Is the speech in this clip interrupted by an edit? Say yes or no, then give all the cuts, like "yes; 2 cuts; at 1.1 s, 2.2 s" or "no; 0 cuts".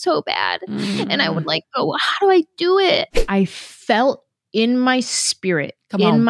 yes; 1 cut; at 3.1 s